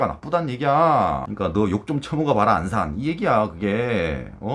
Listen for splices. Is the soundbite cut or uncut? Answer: cut